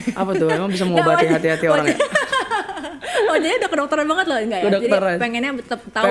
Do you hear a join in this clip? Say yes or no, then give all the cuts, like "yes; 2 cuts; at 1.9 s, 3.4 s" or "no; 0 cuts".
no; 0 cuts